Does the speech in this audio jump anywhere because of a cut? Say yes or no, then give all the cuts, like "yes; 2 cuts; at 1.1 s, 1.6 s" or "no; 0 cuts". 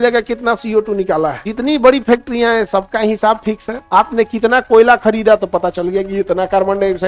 yes; 2 cuts; at 1.4 s, 3.7 s